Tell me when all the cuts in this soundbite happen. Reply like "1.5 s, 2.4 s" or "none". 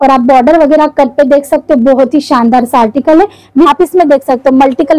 3.7 s